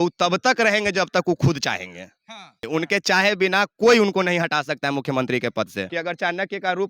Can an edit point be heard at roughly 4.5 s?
no; 2 cuts; at 2.6 s, 5.8 s

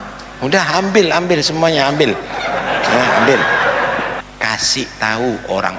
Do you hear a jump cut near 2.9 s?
no; 1 cut; at 4.1 s

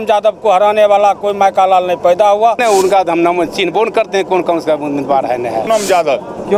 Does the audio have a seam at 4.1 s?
no; 2 cuts; at 2.6 s, 5.7 s

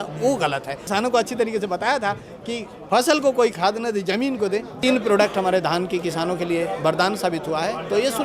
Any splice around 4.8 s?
yes; 2 cuts; at 0.8 s, 4.8 s

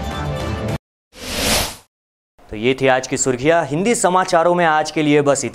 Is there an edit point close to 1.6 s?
no; 0 cuts

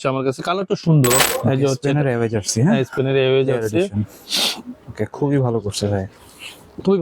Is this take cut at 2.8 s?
no; 1 cut; at 1.2 s

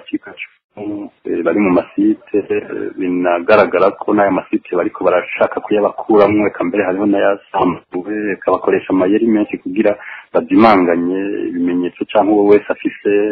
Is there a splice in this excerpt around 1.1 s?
yes; 1 cut; at 1.1 s

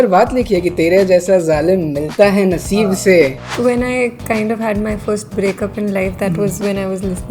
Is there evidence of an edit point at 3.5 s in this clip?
yes; 1 cut; at 3.5 s

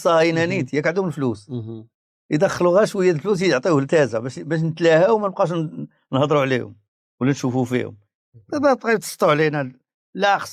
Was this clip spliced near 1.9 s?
no; 0 cuts

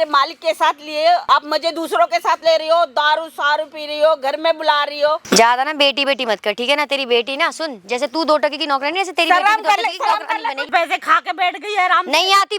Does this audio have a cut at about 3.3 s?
no; 3 cuts; at 1.2 s, 5.2 s, 10.7 s

